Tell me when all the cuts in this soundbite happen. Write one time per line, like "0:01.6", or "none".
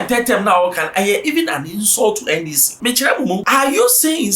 0:02.6
0:03.4